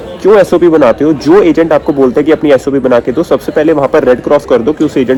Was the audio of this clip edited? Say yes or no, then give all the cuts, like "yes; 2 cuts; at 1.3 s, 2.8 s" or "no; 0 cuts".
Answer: no; 0 cuts